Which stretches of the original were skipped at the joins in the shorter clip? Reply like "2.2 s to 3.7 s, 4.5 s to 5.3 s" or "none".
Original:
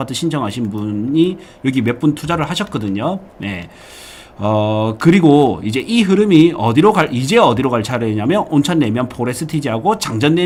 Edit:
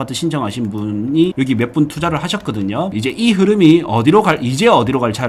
1.3 s to 1.6 s, 3.3 s to 5.7 s